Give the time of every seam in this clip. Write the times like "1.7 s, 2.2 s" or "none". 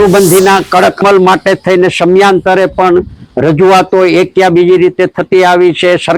1.0 s